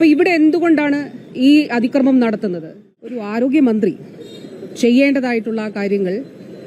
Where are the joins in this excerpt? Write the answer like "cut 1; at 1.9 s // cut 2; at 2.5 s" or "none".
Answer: cut 1; at 3.2 s